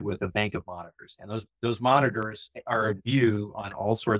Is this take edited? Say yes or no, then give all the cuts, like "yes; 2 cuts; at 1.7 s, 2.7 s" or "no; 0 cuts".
no; 0 cuts